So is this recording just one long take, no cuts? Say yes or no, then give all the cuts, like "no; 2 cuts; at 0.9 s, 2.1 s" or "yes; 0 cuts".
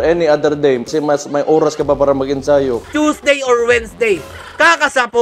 no; 1 cut; at 2.8 s